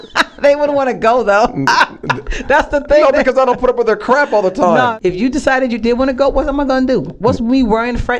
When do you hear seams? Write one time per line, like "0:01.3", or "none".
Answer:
0:04.9